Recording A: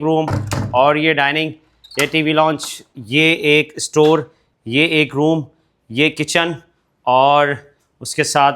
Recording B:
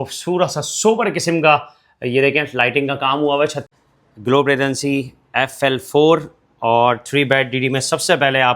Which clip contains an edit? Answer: B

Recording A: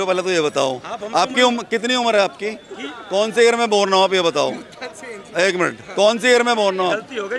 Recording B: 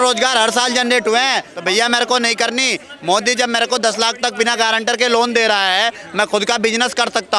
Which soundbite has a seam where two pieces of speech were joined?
B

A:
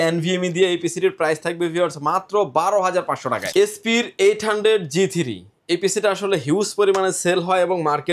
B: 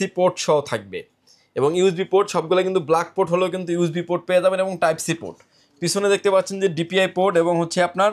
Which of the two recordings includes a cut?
A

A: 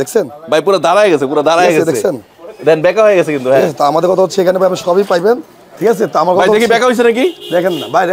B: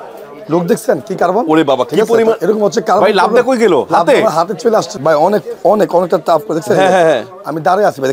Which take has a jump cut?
B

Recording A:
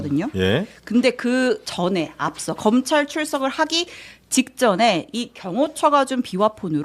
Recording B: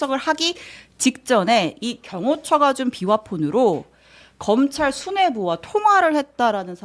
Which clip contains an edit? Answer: A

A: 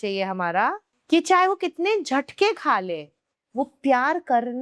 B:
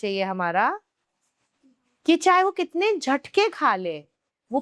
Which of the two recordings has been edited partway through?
A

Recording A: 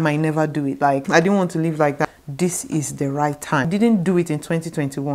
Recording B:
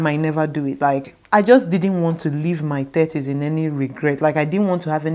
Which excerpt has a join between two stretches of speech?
A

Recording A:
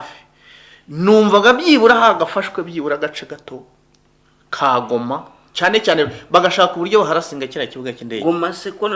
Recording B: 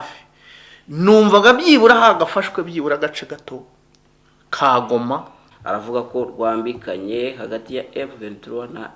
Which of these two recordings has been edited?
B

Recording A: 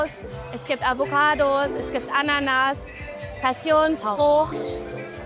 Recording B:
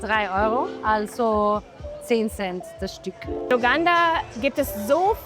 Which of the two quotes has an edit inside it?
B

